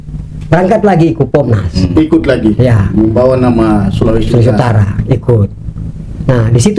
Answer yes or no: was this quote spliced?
no